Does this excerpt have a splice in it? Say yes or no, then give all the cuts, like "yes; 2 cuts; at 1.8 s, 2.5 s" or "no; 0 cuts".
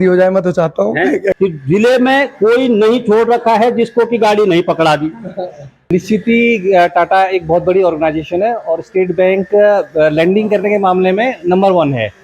yes; 2 cuts; at 1.3 s, 5.9 s